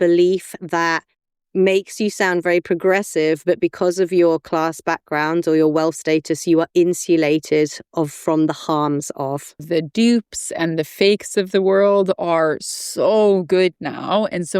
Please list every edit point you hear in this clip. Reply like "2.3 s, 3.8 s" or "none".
9.6 s